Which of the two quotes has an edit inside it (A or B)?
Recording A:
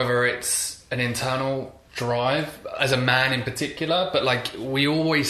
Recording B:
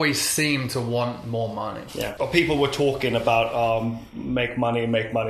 B